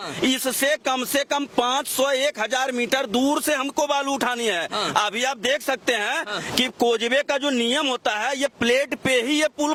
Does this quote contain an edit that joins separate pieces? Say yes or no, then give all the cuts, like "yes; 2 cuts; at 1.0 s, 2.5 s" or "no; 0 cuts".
no; 0 cuts